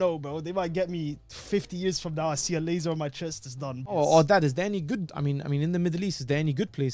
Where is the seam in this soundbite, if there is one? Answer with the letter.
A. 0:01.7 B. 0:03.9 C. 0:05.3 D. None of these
B